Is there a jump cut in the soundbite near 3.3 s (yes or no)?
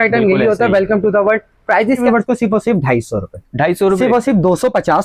no